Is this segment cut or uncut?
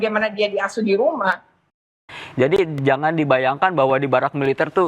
cut